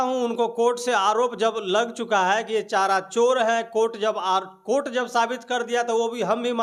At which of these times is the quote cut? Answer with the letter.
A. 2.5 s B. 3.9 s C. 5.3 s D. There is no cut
D